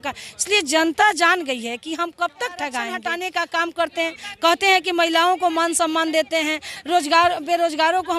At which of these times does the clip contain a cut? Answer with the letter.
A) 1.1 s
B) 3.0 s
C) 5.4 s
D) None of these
B